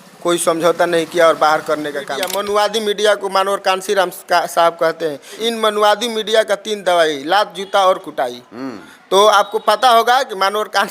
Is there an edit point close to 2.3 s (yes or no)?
yes